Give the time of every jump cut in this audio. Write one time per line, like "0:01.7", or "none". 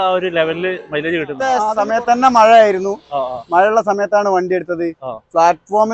0:01.7